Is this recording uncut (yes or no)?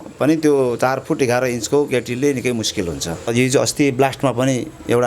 no